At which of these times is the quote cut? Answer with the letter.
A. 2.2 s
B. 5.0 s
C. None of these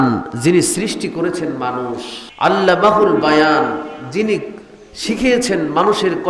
A